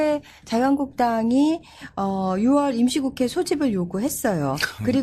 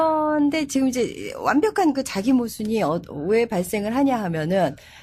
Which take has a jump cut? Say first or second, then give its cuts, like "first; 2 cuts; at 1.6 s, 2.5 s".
first; 1 cut; at 2.2 s